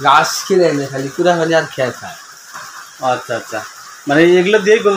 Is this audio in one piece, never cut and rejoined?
yes; 0 cuts

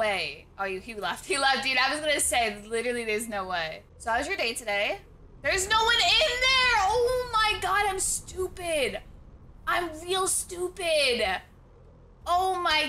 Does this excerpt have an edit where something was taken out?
yes; 1 cut; at 3.8 s

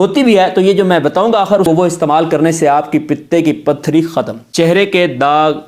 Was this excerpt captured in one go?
no; 2 cuts; at 1.7 s, 4.4 s

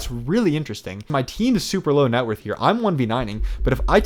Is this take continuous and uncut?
no; 1 cut; at 1.1 s

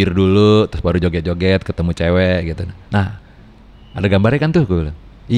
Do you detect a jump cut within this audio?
no; 0 cuts

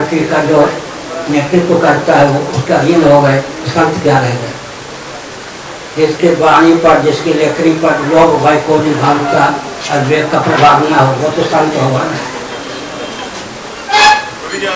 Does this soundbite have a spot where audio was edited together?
no; 0 cuts

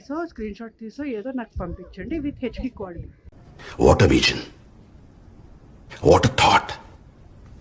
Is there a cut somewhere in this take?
no; 0 cuts

